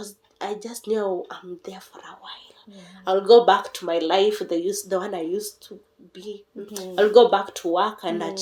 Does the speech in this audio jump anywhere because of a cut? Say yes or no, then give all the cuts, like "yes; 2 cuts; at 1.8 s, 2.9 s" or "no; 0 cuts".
no; 0 cuts